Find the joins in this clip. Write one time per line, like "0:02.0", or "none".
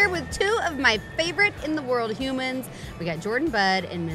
none